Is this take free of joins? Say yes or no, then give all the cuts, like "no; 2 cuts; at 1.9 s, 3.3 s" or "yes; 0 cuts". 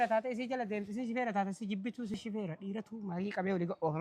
no; 1 cut; at 2.1 s